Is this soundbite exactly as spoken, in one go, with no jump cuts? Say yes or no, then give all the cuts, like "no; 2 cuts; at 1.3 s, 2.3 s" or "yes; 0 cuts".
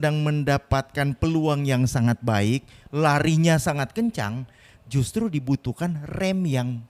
yes; 0 cuts